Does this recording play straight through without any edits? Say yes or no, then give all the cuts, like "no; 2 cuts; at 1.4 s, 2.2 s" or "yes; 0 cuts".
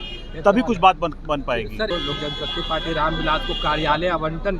no; 1 cut; at 1.9 s